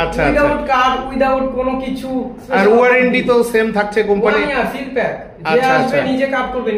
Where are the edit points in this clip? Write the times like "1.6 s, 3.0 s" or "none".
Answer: none